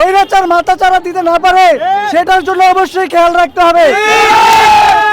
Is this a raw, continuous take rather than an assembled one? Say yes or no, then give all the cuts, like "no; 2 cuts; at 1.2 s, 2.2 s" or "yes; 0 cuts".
yes; 0 cuts